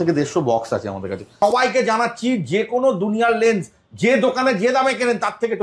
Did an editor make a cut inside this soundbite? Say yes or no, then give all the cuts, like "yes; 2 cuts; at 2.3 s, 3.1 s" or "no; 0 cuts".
yes; 1 cut; at 1.4 s